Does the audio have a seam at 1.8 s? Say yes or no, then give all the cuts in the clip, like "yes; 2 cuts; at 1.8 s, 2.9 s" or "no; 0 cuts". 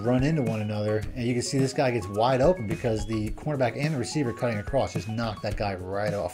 no; 0 cuts